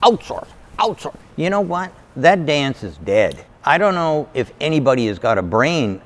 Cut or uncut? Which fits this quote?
uncut